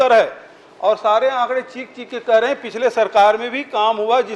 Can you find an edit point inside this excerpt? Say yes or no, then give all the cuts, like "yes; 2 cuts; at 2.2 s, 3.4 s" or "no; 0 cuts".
no; 0 cuts